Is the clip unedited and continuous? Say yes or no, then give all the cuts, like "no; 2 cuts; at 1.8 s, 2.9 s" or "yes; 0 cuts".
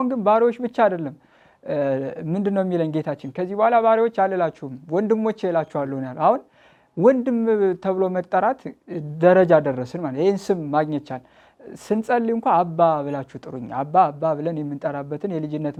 yes; 0 cuts